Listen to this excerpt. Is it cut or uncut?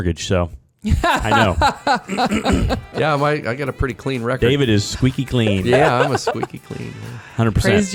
uncut